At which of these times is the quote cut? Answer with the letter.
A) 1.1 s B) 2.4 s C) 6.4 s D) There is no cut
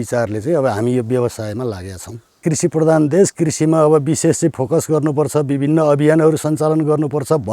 B